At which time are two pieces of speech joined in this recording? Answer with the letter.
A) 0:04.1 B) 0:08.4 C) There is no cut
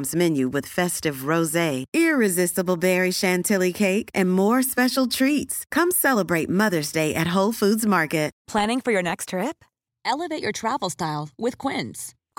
B